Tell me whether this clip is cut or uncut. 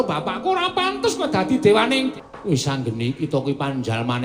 cut